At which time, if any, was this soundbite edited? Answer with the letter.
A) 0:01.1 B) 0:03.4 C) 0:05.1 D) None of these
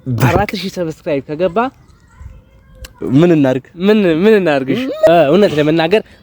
C